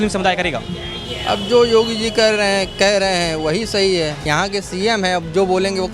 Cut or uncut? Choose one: cut